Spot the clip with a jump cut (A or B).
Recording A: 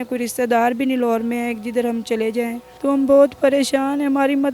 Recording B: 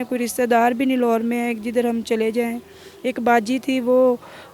A